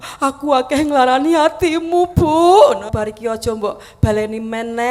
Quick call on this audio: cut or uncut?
cut